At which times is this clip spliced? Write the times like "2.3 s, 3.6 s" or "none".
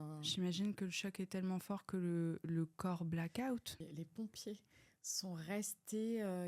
3.7 s